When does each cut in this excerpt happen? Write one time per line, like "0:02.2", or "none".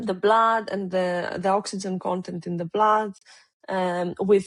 none